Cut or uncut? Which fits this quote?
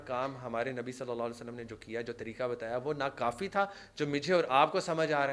uncut